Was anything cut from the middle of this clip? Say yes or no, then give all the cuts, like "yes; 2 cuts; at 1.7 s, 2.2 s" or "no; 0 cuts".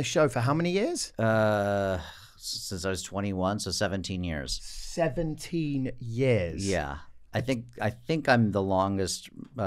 no; 0 cuts